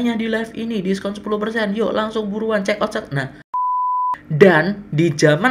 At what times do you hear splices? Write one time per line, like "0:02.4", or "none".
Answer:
0:03.9